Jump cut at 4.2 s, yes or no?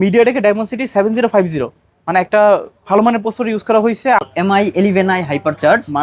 yes